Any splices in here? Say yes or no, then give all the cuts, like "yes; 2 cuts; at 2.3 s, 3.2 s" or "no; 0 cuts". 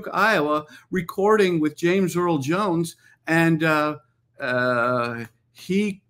no; 0 cuts